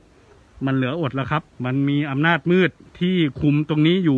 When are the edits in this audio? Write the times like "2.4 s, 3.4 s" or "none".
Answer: 1.5 s, 2.9 s